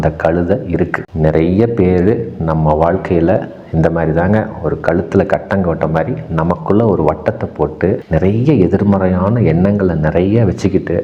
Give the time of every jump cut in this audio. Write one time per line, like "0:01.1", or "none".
0:01.1